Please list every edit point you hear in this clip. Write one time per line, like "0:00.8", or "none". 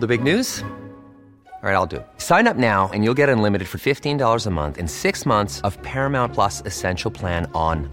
none